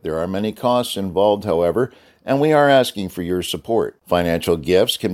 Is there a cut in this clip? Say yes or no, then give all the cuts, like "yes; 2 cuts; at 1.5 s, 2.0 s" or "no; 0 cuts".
no; 0 cuts